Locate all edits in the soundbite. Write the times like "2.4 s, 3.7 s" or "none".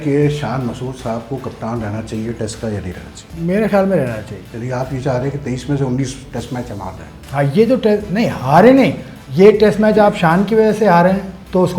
3.3 s, 4.4 s